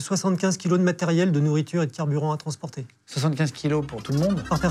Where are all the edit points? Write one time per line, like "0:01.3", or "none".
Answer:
none